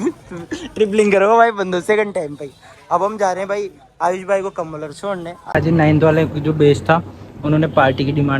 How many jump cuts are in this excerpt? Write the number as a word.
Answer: one